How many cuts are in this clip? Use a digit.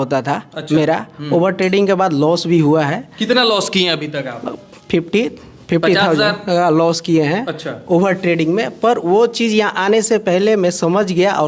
0